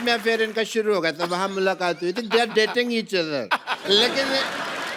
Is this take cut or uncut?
cut